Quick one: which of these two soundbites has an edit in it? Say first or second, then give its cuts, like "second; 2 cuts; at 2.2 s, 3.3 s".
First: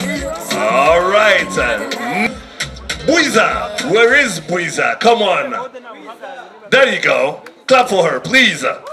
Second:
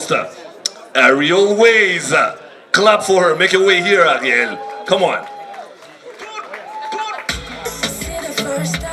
first; 1 cut; at 2.3 s